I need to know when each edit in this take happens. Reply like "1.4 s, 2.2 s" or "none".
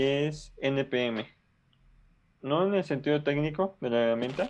none